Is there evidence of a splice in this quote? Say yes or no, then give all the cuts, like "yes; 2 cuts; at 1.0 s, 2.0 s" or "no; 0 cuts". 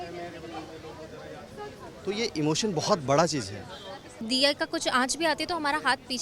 yes; 1 cut; at 4.2 s